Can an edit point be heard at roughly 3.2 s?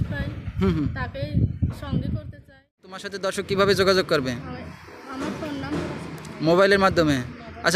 yes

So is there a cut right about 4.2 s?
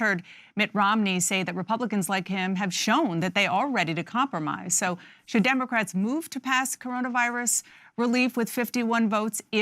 no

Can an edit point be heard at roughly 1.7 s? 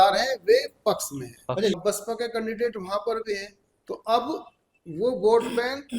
yes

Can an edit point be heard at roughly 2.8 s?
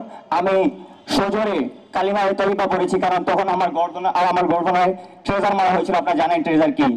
no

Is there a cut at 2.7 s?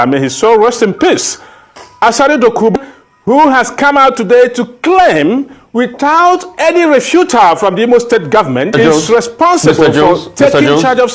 yes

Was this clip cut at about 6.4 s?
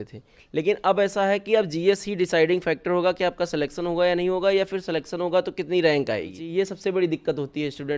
yes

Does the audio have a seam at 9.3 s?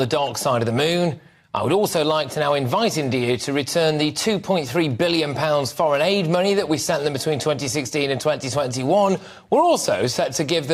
no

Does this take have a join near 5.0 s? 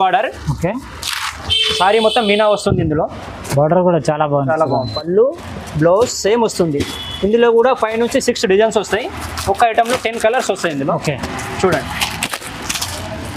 yes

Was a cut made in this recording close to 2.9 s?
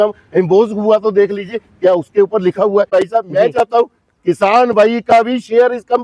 yes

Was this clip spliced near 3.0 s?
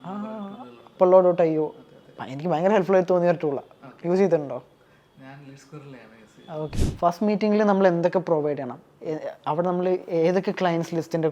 no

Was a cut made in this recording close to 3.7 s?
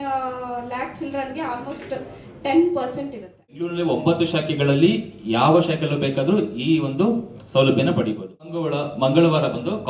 yes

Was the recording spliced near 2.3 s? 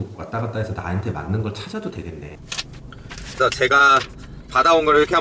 yes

